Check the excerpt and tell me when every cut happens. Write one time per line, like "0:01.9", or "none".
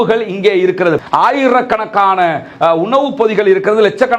0:01.0